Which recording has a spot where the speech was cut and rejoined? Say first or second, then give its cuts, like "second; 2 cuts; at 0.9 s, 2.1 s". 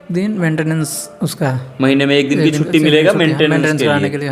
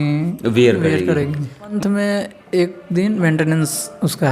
second; 1 cut; at 1.7 s